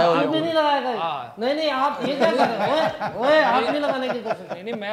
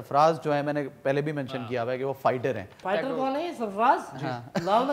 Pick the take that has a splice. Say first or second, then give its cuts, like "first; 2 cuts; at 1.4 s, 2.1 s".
second; 1 cut; at 2.8 s